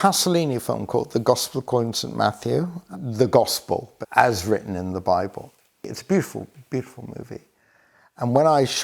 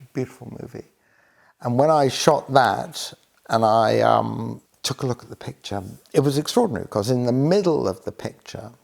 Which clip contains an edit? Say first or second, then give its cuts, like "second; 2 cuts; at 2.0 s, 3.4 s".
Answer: second; 1 cut; at 4.7 s